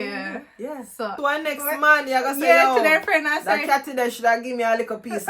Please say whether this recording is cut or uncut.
cut